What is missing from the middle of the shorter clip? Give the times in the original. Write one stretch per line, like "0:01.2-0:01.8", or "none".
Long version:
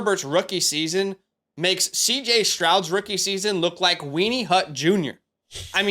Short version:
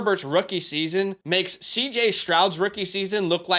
0:01.2-0:01.5